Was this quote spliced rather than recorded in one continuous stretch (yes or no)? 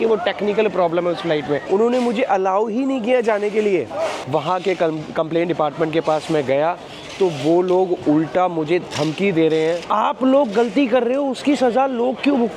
yes